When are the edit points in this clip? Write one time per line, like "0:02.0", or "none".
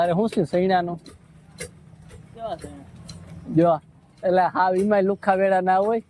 none